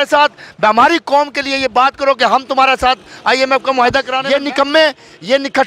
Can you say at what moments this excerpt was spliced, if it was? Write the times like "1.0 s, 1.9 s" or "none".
4.2 s